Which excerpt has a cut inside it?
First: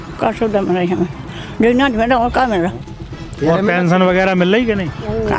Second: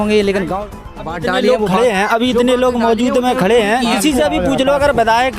second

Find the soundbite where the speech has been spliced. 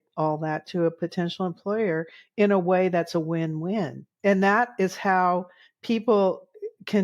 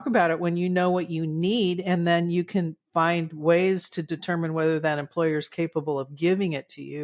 first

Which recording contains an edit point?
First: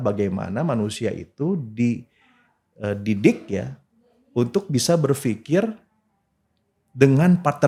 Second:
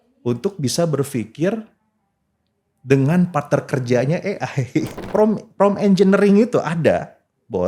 second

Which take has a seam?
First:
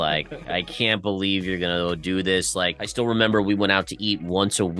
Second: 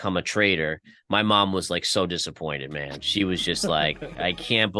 first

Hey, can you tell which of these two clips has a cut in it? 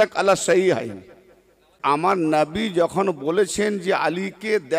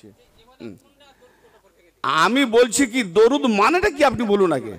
first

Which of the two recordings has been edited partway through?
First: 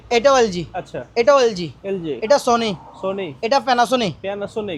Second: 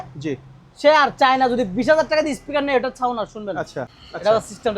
second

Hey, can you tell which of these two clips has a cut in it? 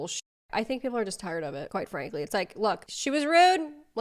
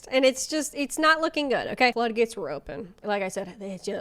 second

